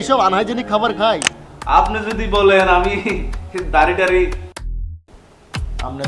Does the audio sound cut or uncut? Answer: cut